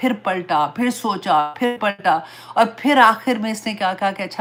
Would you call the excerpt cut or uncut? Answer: uncut